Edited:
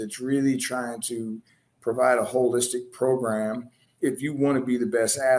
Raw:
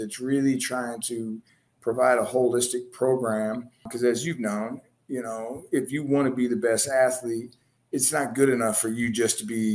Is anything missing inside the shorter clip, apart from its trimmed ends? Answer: yes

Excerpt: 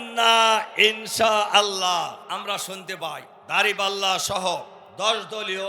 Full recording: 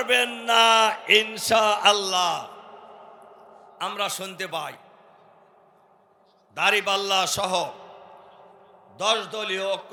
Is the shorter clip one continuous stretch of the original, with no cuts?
no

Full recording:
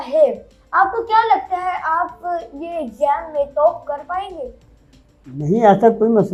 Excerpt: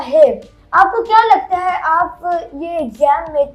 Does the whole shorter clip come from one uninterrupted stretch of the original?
yes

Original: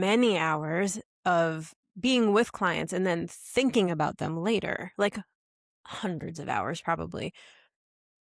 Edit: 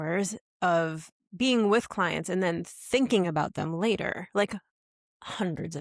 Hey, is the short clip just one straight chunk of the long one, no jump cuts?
yes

